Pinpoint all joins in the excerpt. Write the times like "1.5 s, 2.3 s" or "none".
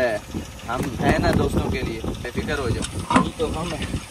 none